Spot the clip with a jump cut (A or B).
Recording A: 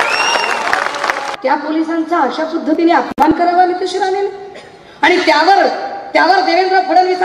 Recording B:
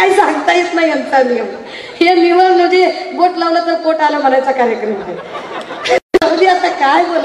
A